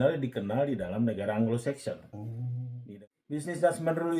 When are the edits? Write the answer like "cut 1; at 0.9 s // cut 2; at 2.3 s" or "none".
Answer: cut 1; at 2.8 s